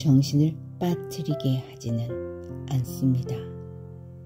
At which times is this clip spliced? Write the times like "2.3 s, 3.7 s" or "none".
3.2 s